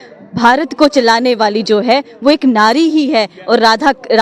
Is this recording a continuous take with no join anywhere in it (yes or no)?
yes